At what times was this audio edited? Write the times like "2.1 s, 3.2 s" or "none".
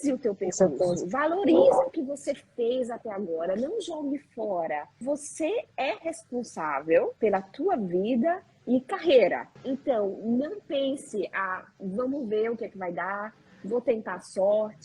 5.0 s, 7.1 s, 9.5 s

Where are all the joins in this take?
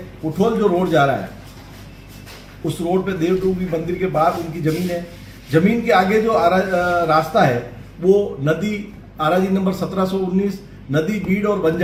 none

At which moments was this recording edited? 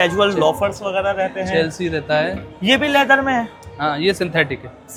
none

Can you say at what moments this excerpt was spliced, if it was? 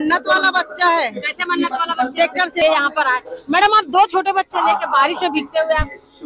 2.6 s

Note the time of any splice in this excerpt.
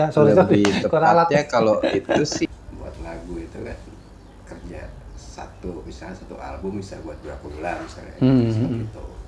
2.5 s

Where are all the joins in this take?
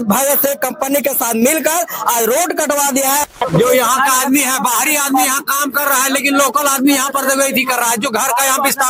3.3 s

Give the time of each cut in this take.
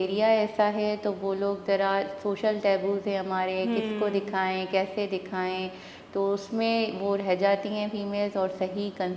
none

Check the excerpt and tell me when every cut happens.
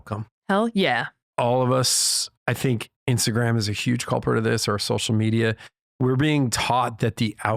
1.2 s

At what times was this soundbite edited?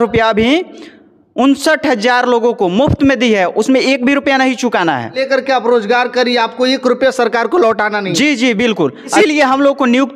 5.2 s, 9.1 s

